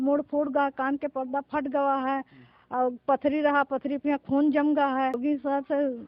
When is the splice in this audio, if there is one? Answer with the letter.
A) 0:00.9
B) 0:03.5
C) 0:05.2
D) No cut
C